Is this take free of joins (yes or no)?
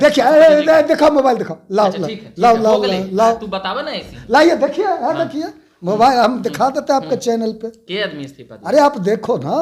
yes